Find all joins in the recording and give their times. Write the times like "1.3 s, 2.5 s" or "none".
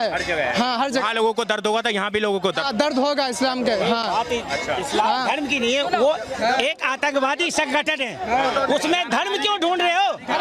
none